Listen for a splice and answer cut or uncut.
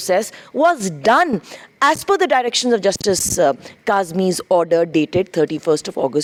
uncut